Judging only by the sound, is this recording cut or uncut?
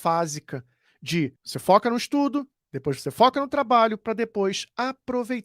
cut